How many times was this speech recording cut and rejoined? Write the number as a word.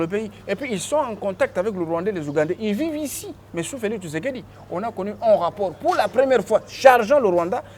zero